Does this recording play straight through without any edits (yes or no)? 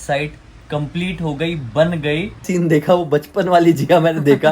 no